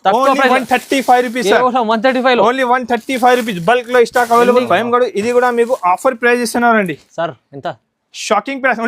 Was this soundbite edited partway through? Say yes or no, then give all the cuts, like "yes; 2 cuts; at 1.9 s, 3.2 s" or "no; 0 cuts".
yes; 1 cut; at 4.6 s